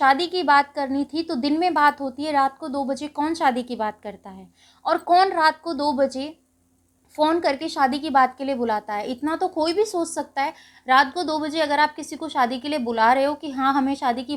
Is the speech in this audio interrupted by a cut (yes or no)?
no